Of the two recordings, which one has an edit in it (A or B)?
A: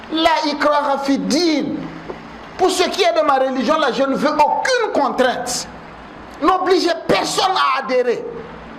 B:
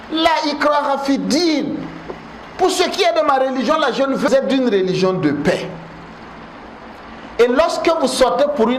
B